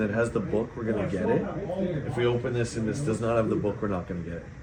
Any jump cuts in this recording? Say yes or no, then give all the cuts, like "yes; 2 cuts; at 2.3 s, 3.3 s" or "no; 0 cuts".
no; 0 cuts